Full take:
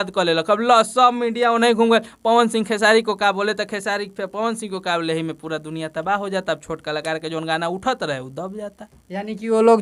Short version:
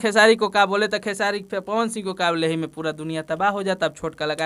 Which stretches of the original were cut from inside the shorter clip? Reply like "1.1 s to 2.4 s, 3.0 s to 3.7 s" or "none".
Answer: none

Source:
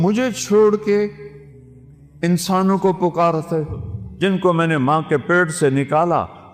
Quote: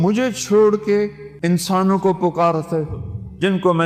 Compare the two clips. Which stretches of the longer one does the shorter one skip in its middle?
1.2 s to 2.0 s

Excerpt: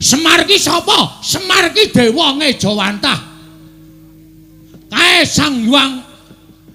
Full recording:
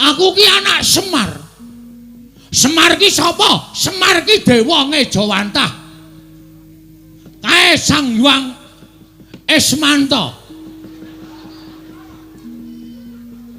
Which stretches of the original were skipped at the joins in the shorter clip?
none

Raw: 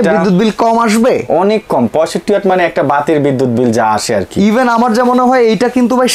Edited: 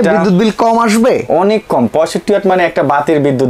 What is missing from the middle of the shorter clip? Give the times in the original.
none

